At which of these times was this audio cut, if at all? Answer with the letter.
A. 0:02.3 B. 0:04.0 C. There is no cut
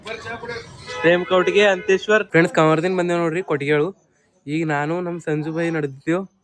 A